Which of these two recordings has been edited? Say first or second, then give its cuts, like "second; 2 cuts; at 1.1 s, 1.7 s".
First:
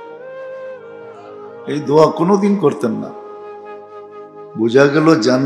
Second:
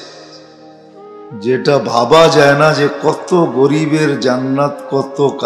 first; 2 cuts; at 3.1 s, 4.5 s